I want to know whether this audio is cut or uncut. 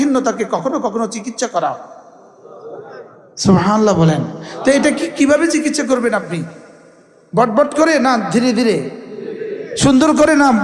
uncut